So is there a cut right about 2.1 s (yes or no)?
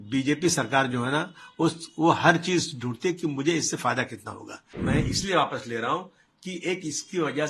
no